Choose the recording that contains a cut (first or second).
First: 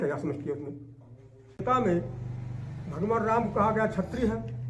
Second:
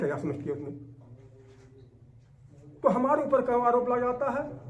first